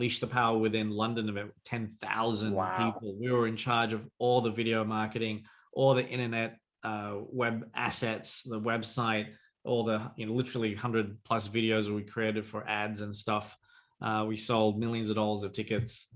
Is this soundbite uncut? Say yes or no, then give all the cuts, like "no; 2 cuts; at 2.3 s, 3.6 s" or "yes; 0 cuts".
yes; 0 cuts